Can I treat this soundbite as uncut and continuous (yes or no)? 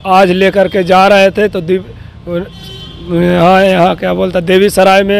yes